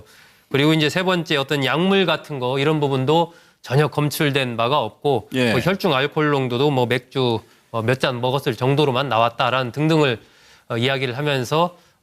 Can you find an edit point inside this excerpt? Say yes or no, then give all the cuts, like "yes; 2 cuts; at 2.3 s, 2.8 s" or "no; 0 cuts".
yes; 1 cut; at 8.0 s